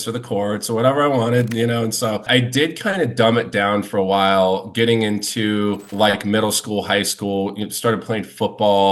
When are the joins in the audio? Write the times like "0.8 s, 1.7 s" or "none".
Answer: 2.3 s, 5.9 s

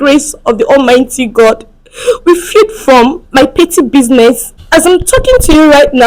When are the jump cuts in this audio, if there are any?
4.6 s

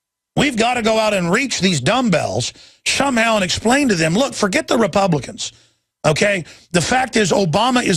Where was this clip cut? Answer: none

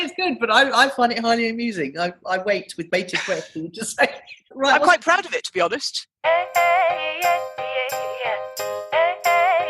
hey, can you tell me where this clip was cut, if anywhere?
4.5 s, 6.1 s

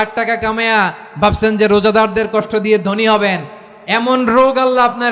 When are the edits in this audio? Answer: none

